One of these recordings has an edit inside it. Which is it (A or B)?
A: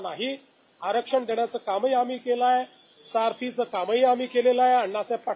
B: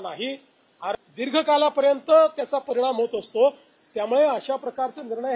B